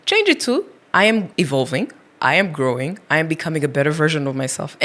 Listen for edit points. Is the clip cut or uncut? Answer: cut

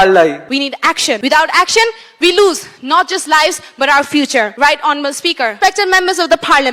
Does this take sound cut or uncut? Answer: cut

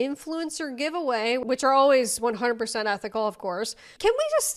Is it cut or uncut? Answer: uncut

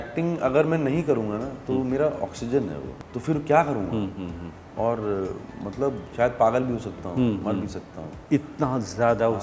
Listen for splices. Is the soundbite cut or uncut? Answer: cut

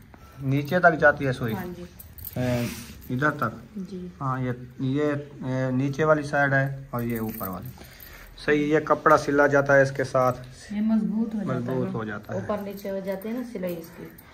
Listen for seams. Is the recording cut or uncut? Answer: uncut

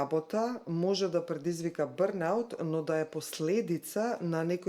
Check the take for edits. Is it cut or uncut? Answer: uncut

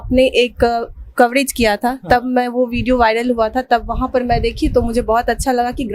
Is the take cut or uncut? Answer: uncut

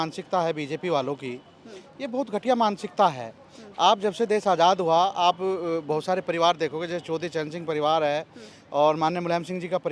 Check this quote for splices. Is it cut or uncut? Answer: uncut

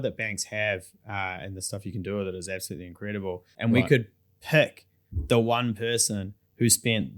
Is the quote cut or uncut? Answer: cut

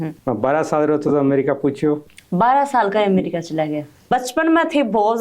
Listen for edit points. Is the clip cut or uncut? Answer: cut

